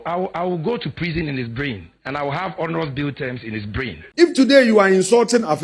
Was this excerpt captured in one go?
no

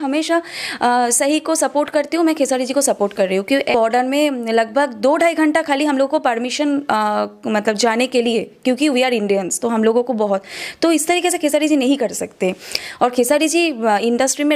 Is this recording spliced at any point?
yes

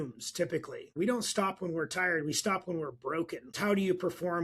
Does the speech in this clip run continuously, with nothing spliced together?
no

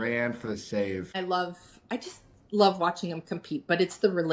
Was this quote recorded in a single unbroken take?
no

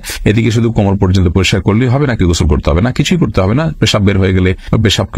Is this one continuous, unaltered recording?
yes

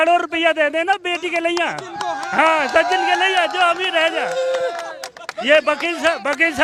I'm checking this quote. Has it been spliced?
no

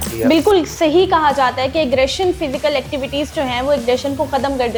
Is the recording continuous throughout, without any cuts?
yes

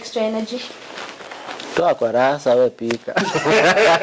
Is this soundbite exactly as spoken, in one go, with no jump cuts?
yes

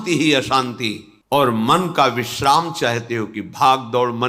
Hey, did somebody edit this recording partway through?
yes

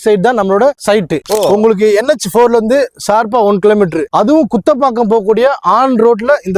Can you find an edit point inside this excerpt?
no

